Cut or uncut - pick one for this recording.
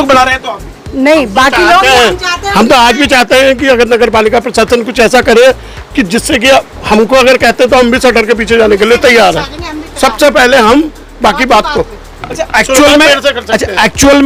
uncut